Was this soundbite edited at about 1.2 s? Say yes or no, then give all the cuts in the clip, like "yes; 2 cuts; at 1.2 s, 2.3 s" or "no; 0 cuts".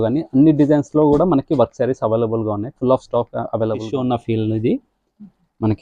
no; 1 cut; at 3.9 s